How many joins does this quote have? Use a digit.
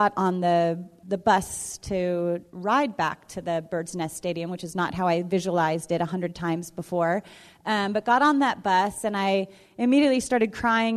1